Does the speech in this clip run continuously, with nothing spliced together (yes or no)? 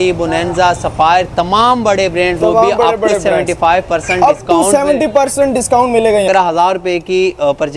no